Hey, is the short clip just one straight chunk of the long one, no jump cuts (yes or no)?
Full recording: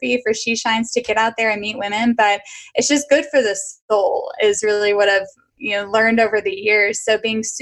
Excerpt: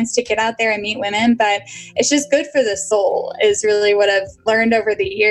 no